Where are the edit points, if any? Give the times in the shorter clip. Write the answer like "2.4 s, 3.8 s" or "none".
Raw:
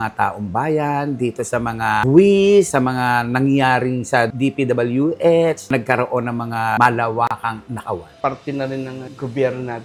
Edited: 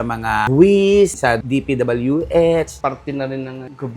1.1 s, 2.7 s